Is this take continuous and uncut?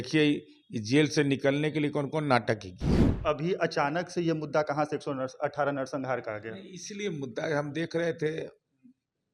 no; 1 cut; at 3.1 s

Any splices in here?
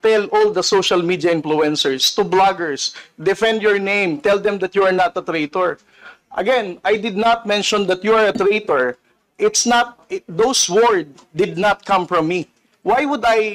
no; 0 cuts

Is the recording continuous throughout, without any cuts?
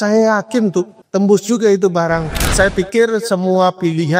no; 2 cuts; at 1.0 s, 2.4 s

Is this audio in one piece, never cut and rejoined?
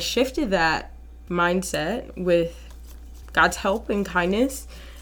yes; 0 cuts

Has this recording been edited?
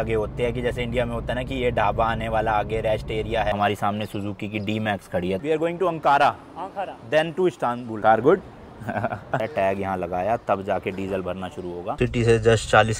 yes; 5 cuts; at 3.5 s, 5.4 s, 8.0 s, 9.4 s, 12.0 s

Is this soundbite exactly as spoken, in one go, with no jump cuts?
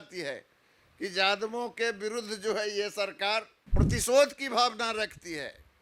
no; 1 cut; at 3.6 s

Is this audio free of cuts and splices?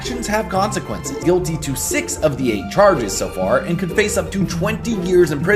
no; 1 cut; at 1.2 s

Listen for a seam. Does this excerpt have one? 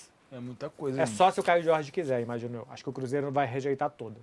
no; 0 cuts

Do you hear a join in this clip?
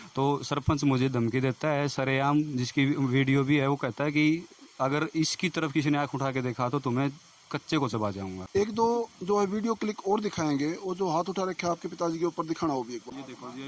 no; 0 cuts

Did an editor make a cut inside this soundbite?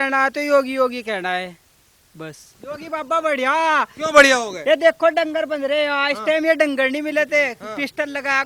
yes; 1 cut; at 2.5 s

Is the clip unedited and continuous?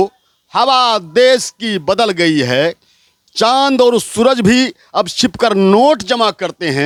yes; 0 cuts

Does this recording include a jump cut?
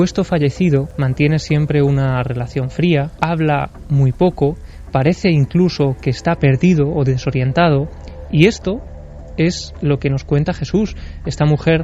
yes; 2 cuts; at 1.0 s, 3.1 s

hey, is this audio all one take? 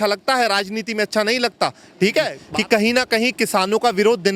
no; 1 cut; at 2.4 s

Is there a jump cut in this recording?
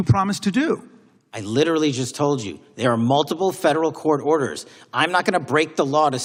no; 0 cuts

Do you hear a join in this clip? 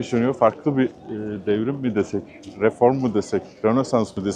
no; 0 cuts

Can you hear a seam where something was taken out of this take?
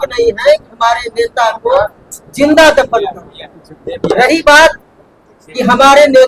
no; 0 cuts

